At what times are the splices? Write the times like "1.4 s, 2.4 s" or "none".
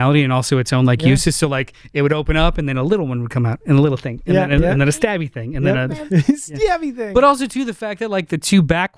none